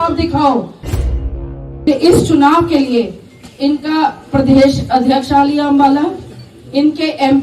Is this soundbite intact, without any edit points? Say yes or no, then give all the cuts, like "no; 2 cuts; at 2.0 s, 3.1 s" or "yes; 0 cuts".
no; 1 cut; at 1.3 s